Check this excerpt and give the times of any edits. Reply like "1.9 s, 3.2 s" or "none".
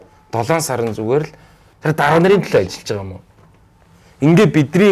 1.7 s

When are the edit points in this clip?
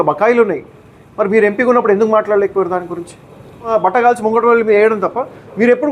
3.7 s

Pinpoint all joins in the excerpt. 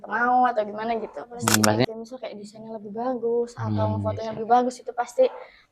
1.8 s

